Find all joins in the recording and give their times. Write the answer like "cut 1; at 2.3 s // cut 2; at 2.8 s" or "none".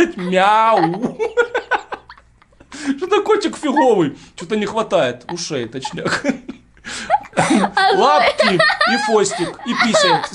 none